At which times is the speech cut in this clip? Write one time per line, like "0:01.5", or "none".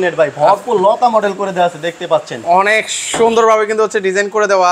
none